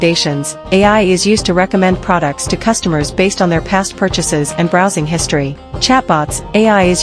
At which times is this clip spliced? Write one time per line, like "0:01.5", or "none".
0:05.7

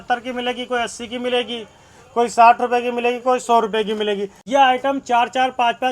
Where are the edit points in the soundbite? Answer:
0:04.4

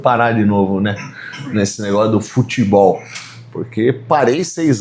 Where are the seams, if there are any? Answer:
none

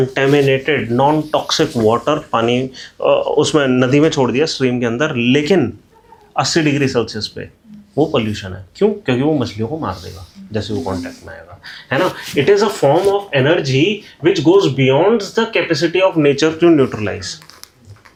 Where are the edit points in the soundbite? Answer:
none

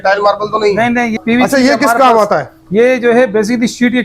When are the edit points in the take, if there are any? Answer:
0:01.2

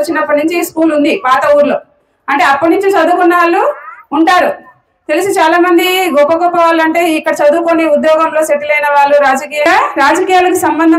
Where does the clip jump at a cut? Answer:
0:09.7

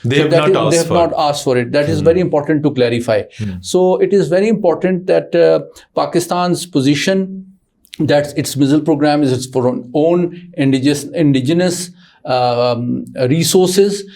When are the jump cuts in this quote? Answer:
none

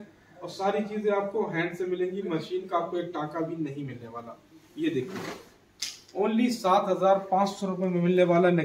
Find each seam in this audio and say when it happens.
none

